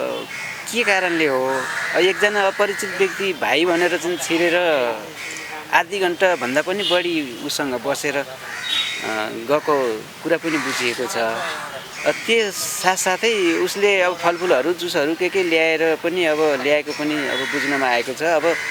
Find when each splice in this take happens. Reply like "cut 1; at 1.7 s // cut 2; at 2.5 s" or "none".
none